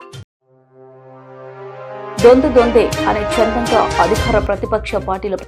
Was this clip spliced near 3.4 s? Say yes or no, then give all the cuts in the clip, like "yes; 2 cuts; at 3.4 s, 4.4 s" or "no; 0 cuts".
no; 1 cut; at 2.2 s